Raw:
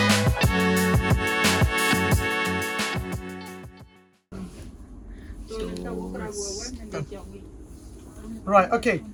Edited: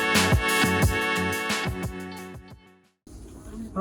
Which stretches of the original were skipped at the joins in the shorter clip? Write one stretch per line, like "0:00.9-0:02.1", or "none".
0:04.2-0:07.6